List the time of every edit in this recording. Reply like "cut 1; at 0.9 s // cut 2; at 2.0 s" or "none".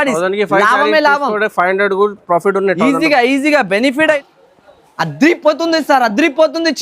cut 1; at 4.2 s